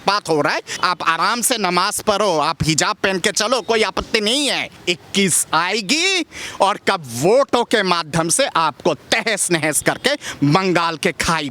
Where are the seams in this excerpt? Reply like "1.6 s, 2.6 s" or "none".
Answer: 0.8 s, 4.8 s